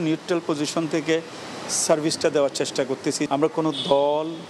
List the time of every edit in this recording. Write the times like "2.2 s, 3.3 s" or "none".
3.3 s